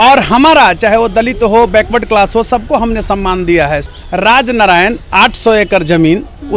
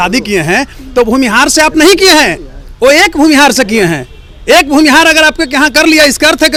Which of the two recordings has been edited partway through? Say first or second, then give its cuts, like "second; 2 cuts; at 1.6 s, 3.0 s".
first; 1 cut; at 3.9 s